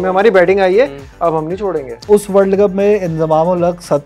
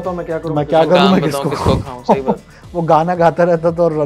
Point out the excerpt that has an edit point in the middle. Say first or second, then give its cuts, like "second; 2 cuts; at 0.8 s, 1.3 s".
first; 1 cut; at 2.0 s